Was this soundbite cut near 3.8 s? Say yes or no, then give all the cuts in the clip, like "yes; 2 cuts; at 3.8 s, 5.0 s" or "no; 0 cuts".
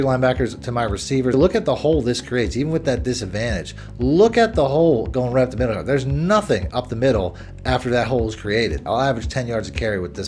yes; 3 cuts; at 1.3 s, 3.8 s, 8.8 s